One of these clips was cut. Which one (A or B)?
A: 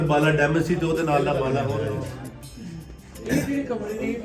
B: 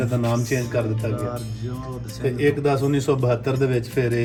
A